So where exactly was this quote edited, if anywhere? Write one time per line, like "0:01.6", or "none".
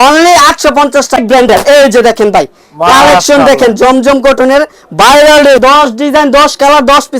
0:01.2
0:05.6